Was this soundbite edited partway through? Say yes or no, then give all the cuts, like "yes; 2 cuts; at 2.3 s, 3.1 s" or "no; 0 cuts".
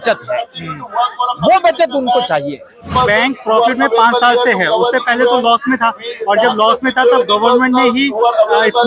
yes; 1 cut; at 2.9 s